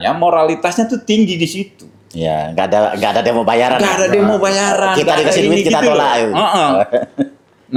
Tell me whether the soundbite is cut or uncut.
uncut